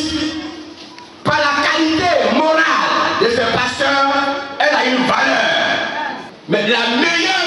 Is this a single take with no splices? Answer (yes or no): no